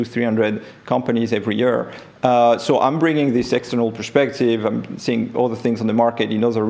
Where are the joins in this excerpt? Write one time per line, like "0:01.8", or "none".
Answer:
none